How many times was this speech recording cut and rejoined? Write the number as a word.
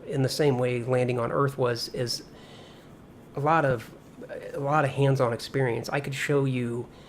one